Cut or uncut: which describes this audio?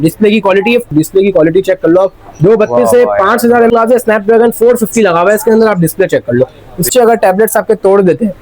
cut